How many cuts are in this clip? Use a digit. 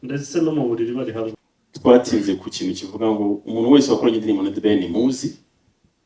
1